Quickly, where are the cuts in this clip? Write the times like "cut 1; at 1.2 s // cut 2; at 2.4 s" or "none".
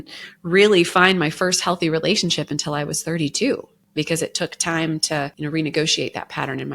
cut 1; at 3.8 s // cut 2; at 5.3 s